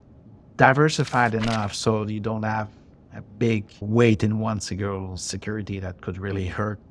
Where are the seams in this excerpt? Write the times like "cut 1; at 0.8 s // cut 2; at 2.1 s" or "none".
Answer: cut 1; at 3.8 s